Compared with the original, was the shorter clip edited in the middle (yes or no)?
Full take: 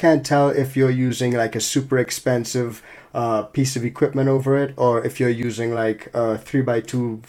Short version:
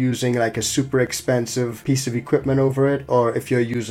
yes